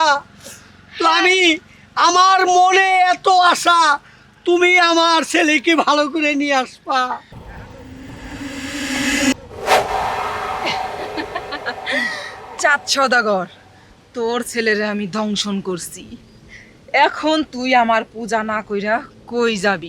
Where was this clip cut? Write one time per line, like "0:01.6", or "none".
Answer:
0:07.2